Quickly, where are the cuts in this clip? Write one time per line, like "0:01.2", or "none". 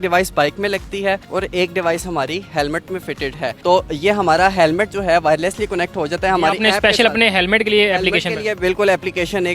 none

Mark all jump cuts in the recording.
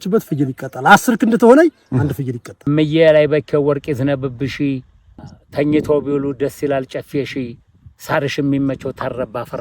0:02.5

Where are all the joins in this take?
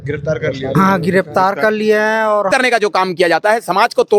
0:02.5

